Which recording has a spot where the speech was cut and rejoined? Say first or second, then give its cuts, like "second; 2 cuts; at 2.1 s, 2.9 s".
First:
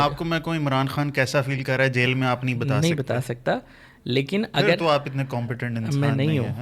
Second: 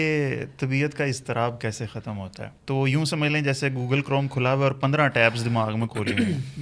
second; 1 cut; at 2.5 s